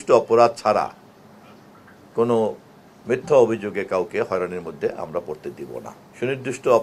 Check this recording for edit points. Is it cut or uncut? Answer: uncut